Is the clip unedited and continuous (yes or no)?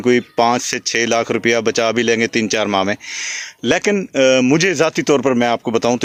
yes